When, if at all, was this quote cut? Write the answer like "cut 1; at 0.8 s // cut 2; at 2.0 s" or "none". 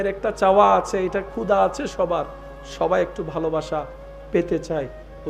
none